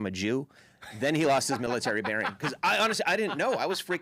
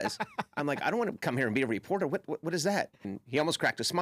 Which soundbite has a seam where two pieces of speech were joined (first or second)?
second